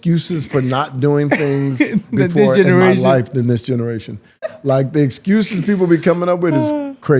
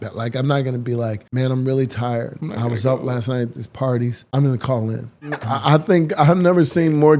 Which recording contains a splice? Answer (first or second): second